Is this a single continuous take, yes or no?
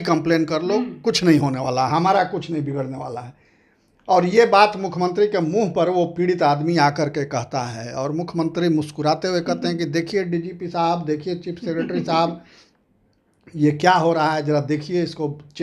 yes